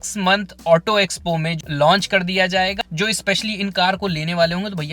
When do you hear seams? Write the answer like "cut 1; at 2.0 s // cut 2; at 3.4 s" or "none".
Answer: cut 1; at 1.5 s // cut 2; at 2.7 s